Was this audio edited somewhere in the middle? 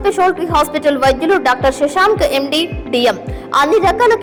no; 0 cuts

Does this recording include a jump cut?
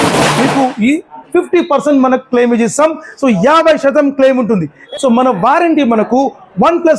yes; 1 cut; at 4.8 s

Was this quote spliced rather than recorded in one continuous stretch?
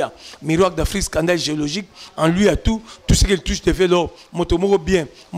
no; 0 cuts

